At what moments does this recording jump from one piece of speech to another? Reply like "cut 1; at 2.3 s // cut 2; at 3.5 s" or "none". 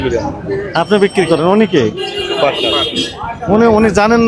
none